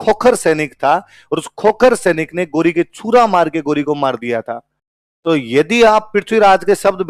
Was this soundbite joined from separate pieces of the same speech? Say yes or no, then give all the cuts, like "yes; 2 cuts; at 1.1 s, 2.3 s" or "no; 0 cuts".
no; 0 cuts